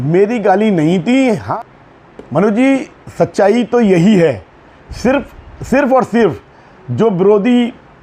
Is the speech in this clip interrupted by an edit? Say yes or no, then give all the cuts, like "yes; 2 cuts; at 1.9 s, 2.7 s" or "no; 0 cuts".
yes; 1 cut; at 1.5 s